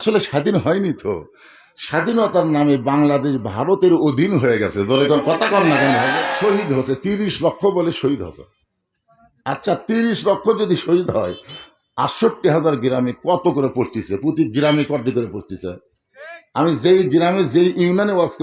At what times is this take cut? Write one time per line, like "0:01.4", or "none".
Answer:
0:06.3

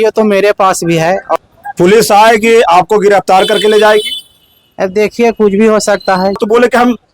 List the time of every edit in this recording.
0:01.4
0:06.4

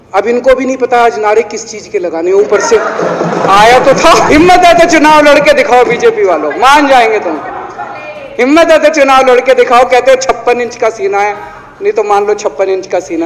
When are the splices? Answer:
0:04.3

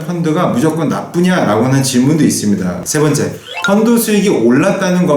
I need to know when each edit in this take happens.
0:02.8

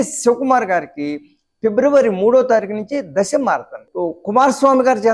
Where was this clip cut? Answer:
0:03.8

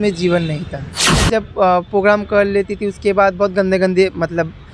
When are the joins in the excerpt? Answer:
0:01.2

